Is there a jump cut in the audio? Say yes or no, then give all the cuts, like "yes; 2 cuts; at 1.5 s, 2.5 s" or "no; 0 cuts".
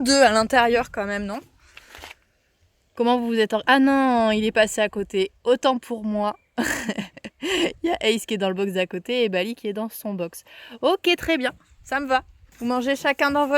yes; 1 cut; at 12.4 s